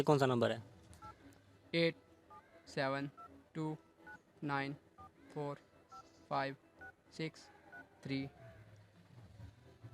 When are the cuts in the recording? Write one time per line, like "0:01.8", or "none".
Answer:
none